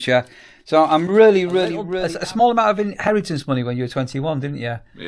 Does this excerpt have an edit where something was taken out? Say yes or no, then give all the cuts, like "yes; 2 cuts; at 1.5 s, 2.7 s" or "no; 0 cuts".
yes; 1 cut; at 1.9 s